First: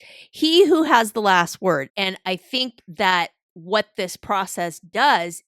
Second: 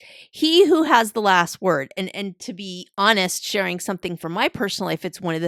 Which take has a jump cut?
first; 1 cut; at 1.9 s

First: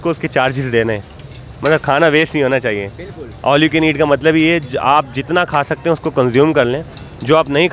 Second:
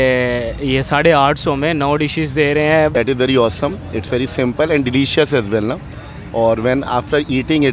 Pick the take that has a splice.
second; 1 cut; at 2.9 s

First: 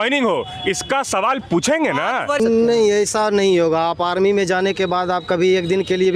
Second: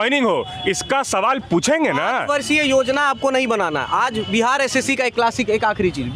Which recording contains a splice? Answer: first; 1 cut; at 2.4 s

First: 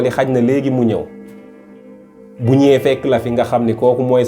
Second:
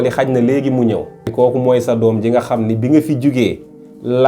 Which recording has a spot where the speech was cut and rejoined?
second; 1 cut; at 1.3 s

